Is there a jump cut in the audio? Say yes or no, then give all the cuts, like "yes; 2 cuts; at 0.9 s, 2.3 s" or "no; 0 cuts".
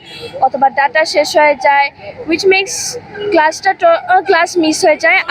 no; 0 cuts